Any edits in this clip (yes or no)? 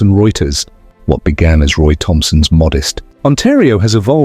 yes